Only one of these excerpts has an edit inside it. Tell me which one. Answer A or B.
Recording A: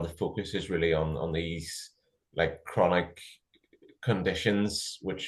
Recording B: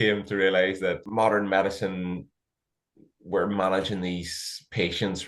B